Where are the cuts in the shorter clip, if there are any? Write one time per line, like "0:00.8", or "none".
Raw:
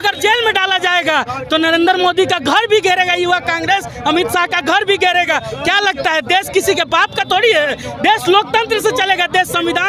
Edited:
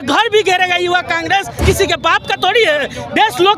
0:01.6

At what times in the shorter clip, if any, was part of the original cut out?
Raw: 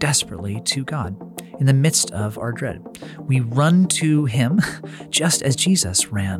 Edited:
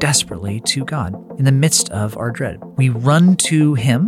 0:01.2
0:02.6

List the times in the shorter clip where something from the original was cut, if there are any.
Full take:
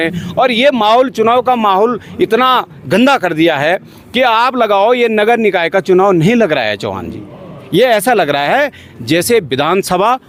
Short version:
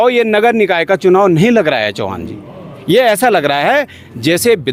none

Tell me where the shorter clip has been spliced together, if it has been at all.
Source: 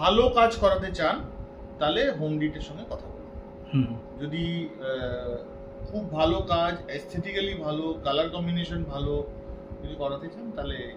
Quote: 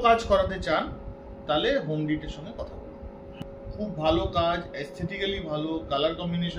0:03.3

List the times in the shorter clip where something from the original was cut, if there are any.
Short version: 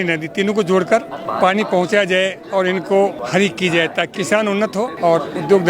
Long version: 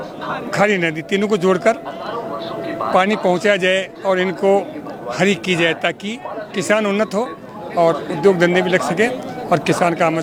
0:01.2
0:03.2
0:04.6

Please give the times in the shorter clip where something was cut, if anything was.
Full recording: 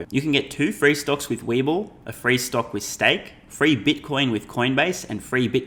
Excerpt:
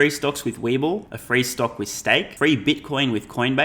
0:01.1
0:02.3

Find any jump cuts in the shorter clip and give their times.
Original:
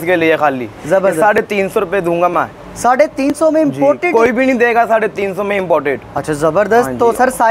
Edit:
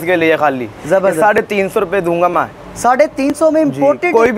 none

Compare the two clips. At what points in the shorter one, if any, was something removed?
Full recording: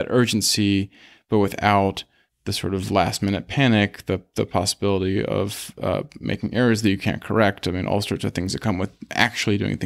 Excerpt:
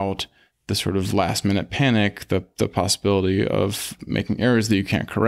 0:03.9

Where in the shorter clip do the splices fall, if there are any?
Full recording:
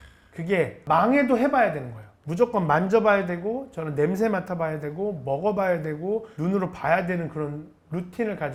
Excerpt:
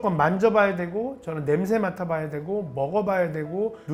none

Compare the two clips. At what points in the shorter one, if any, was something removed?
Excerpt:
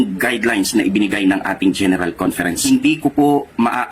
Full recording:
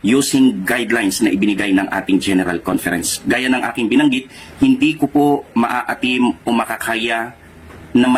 0:02.6

